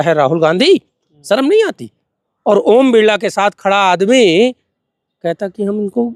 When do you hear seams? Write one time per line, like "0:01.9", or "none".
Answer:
none